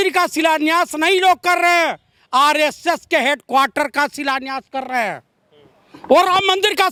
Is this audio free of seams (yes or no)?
yes